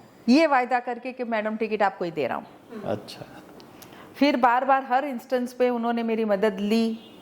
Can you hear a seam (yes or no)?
no